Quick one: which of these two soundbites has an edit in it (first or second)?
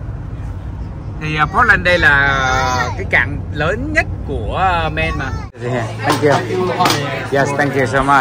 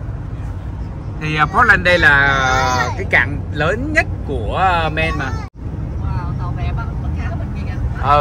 first